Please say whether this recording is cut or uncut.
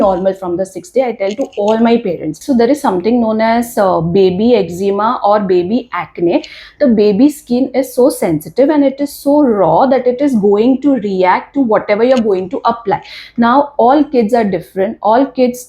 cut